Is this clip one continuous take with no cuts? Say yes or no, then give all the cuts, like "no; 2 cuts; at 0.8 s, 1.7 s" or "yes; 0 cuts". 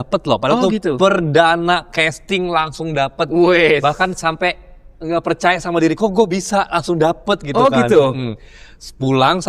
yes; 0 cuts